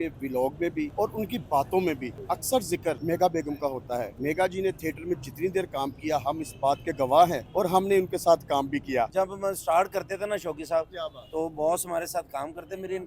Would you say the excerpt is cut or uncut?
cut